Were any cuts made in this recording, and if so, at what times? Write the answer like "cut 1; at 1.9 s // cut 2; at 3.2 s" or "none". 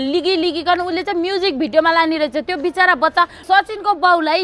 cut 1; at 3.4 s